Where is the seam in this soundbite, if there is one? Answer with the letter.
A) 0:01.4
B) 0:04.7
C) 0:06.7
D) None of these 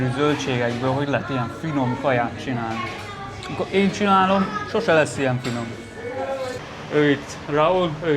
C